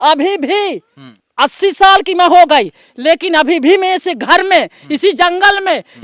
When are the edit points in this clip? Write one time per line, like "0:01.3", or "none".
0:01.0